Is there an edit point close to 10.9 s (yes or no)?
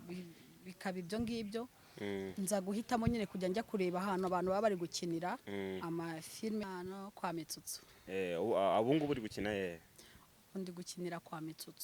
no